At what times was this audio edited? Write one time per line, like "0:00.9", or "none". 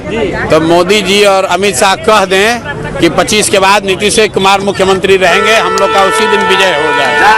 none